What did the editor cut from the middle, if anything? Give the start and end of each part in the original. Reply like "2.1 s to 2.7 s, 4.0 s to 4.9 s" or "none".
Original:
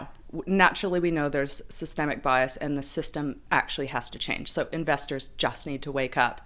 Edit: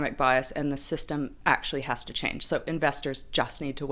none